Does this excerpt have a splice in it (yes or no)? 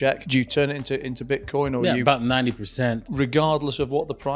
no